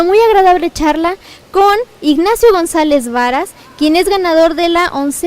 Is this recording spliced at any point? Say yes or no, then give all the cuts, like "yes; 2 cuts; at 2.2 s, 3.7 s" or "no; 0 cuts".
yes; 1 cut; at 2.7 s